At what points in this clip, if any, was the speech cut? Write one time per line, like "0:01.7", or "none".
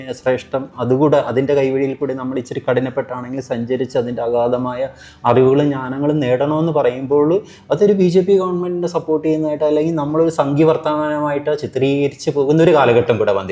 none